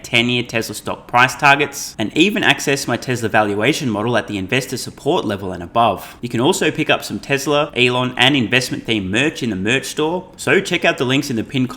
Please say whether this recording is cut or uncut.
cut